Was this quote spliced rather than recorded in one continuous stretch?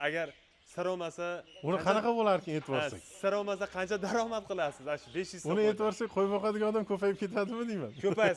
no; 0 cuts

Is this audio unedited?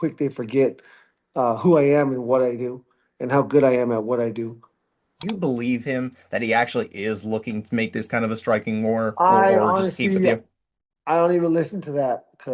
no; 1 cut; at 5.1 s

